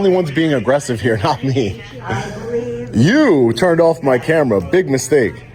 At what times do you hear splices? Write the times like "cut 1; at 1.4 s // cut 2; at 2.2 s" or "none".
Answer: none